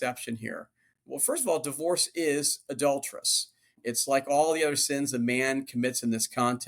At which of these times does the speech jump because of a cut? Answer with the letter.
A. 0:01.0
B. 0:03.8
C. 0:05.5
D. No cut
B